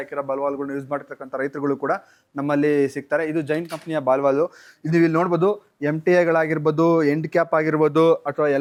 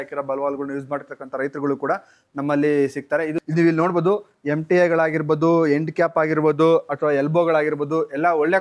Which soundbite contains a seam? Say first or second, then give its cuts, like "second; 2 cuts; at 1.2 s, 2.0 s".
second; 1 cut; at 3.4 s